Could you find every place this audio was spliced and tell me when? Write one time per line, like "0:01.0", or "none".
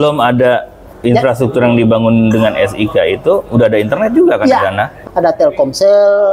0:05.0